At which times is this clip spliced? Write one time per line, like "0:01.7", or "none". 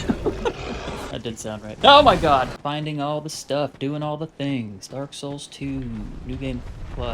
0:01.6
0:02.6